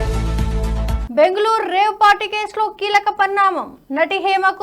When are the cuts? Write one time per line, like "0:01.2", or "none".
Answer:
0:01.0